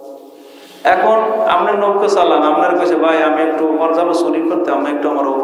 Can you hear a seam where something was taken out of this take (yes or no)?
no